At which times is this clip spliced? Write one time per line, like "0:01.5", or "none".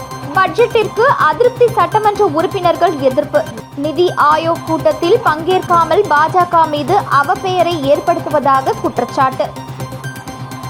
none